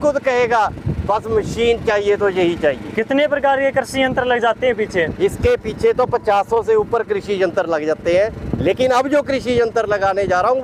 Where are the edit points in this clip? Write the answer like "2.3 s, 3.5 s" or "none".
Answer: none

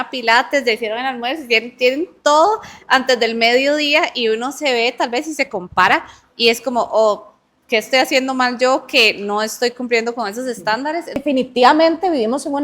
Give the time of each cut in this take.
11.2 s

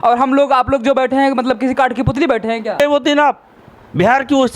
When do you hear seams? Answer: 2.8 s

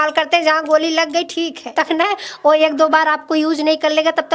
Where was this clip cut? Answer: 1.7 s

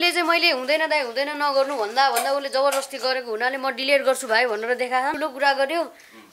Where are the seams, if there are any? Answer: 5.2 s

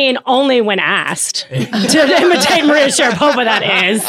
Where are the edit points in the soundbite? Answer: none

